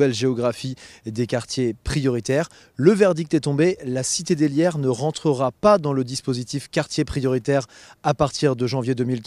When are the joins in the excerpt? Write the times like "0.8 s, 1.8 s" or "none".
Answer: 6.4 s